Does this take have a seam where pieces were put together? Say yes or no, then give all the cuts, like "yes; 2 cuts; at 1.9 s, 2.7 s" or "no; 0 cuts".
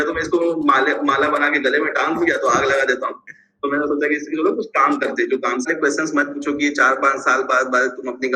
yes; 1 cut; at 5.7 s